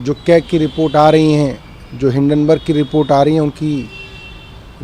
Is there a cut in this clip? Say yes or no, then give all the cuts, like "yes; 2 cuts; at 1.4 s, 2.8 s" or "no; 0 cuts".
no; 0 cuts